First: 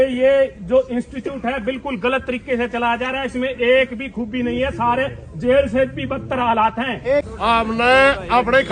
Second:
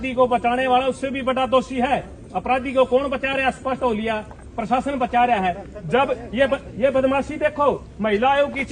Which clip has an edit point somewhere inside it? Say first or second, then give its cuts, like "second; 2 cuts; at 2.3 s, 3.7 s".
first; 1 cut; at 7.3 s